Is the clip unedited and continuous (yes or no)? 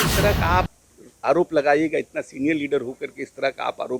yes